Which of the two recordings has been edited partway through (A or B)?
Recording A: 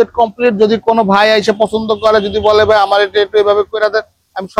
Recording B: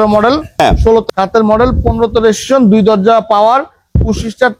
B